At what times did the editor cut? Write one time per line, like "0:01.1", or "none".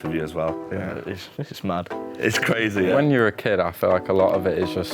0:02.9